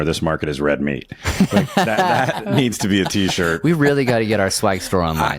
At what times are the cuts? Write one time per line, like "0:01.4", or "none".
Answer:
none